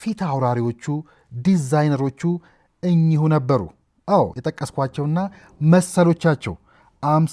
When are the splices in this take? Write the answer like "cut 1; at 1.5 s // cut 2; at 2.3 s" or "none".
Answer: none